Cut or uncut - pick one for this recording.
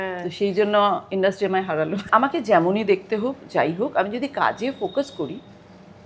cut